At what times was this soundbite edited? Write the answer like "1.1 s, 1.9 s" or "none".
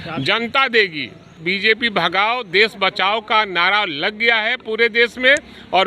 1.4 s

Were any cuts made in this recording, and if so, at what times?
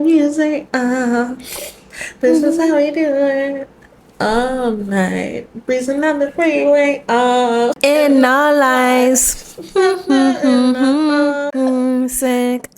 7.8 s, 11.5 s

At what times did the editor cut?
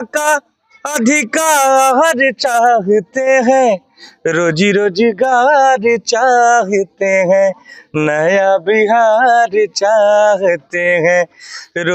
none

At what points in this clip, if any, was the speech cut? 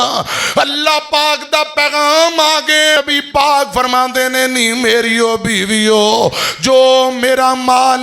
3.0 s

